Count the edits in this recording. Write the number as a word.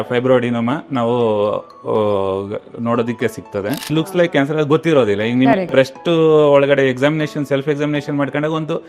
one